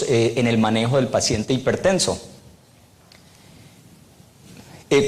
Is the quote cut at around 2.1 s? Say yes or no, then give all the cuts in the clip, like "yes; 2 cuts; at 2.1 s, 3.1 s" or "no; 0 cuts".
no; 0 cuts